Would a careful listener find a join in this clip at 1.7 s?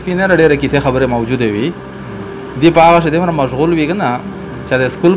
no; 0 cuts

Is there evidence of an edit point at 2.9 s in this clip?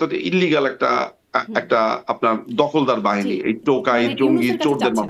no; 0 cuts

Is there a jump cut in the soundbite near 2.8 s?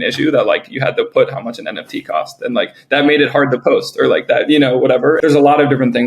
no; 1 cut; at 5.2 s

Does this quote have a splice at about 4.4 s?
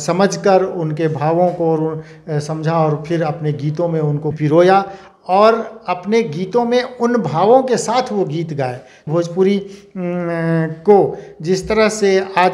yes; 2 cuts; at 4.4 s, 9.0 s

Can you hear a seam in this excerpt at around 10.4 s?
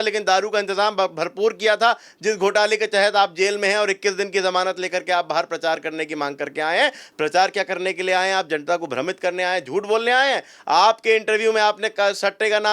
no; 0 cuts

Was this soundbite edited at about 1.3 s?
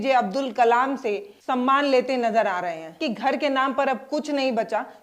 yes; 2 cuts; at 1.3 s, 3.0 s

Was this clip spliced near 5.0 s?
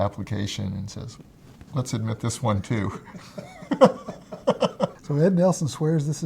yes; 1 cut; at 5.0 s

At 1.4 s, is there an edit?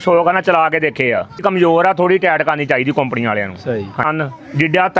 yes; 2 cuts; at 1.4 s, 4.1 s

